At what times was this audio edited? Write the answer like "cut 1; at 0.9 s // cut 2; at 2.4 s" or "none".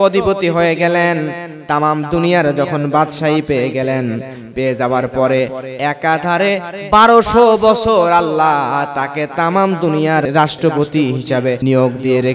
cut 1; at 10.2 s // cut 2; at 11.6 s